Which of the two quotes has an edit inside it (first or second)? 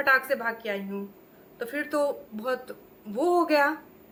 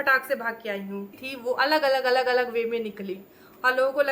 second